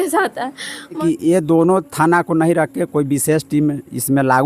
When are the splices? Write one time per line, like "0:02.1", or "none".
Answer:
0:01.0